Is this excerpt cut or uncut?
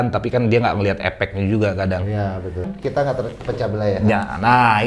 cut